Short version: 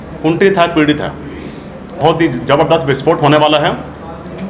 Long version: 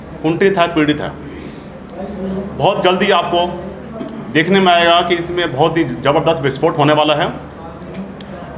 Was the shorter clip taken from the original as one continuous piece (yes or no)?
no